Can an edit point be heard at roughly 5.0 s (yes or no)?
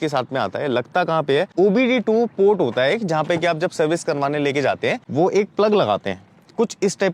yes